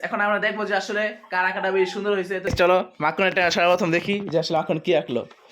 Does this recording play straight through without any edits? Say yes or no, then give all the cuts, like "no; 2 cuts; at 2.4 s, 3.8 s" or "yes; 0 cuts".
no; 1 cut; at 2.5 s